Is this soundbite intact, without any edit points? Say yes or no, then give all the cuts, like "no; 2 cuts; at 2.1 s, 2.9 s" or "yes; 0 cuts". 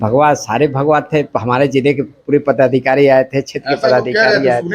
yes; 0 cuts